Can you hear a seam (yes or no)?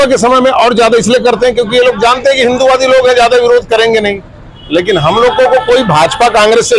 no